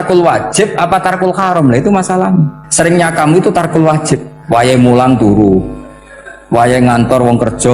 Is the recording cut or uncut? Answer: cut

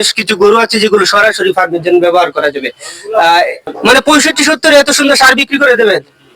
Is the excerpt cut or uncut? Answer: cut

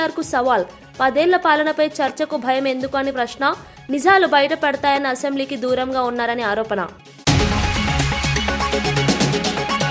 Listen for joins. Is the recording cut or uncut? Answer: cut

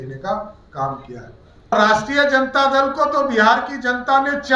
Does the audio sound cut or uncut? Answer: cut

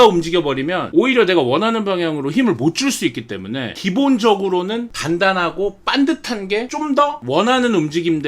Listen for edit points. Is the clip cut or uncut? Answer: uncut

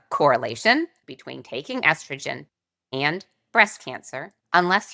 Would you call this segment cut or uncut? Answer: uncut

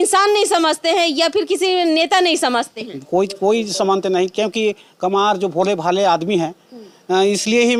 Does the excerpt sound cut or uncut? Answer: uncut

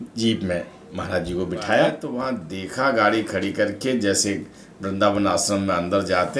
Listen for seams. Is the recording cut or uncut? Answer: cut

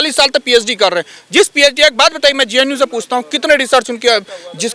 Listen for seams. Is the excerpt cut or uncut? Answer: uncut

